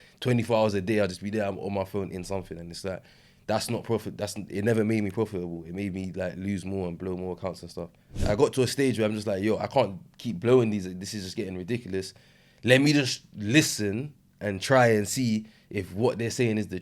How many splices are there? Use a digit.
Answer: 1